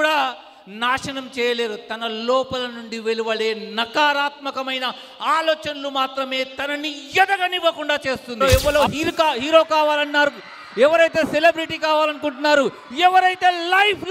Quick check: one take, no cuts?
no; 1 cut; at 8.4 s

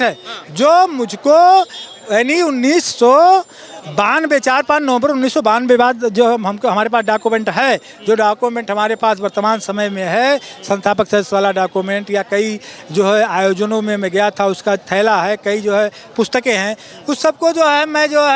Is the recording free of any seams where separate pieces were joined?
yes; 0 cuts

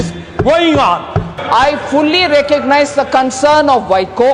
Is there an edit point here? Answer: yes; 1 cut; at 1.3 s

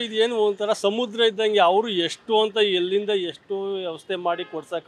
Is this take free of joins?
yes; 0 cuts

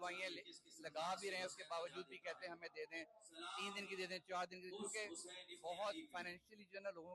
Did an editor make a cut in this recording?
no; 0 cuts

